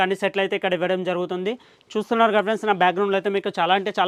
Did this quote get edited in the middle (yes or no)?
no